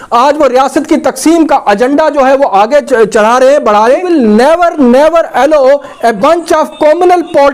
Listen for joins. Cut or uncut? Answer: cut